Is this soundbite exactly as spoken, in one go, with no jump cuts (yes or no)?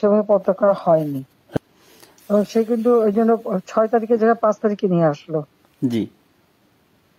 no